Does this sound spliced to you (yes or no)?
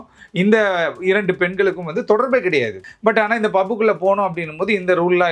yes